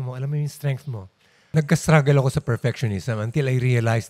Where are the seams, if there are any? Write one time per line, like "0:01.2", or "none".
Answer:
0:01.4